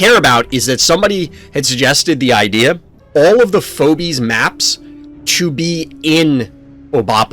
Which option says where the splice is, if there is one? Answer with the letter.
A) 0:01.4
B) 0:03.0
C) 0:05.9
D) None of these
B